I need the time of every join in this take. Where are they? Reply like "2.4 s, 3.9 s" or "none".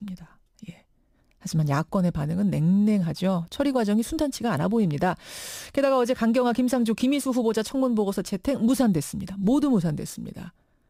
none